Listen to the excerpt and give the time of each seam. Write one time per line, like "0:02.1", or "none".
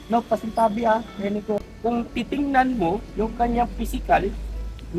0:01.7